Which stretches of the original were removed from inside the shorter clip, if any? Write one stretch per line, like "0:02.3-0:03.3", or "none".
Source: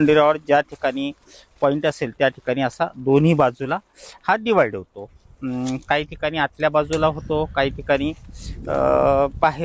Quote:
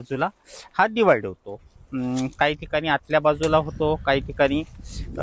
none

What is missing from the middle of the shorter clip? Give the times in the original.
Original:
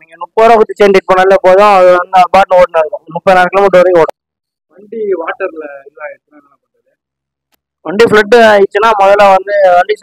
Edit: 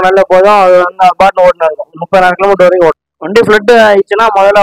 0:04.3-0:07.8

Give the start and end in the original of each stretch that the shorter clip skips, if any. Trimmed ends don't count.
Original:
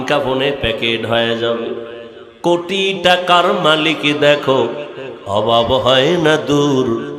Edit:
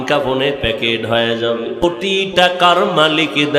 0:01.8-0:02.5

